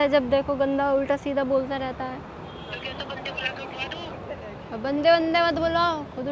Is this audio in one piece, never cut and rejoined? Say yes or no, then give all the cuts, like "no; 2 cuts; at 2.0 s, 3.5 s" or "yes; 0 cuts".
yes; 0 cuts